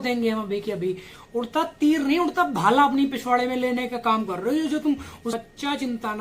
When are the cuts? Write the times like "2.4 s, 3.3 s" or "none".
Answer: 1.1 s, 5.4 s